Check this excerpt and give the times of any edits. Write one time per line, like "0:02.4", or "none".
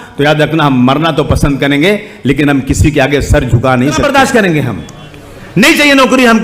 0:04.0